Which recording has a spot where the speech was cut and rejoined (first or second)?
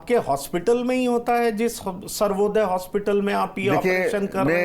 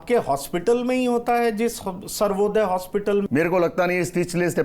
second